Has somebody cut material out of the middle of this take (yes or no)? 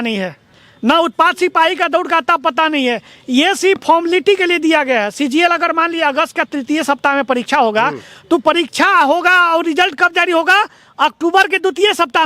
no